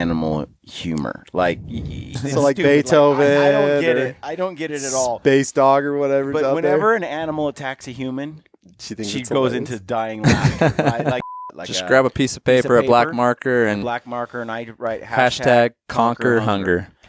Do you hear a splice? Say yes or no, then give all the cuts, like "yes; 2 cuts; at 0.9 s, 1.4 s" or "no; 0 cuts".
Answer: yes; 2 cuts; at 2.2 s, 11.3 s